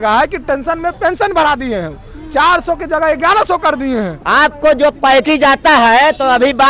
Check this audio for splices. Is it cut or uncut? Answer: cut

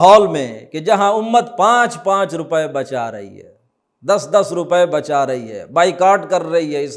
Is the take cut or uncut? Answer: uncut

